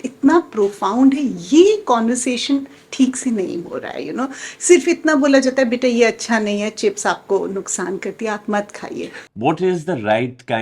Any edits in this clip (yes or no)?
yes